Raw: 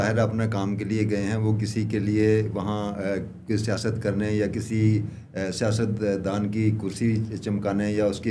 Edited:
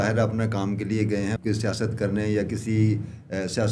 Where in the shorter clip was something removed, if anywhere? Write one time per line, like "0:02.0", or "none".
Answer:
0:01.4